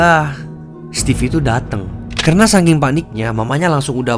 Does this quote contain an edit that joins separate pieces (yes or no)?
yes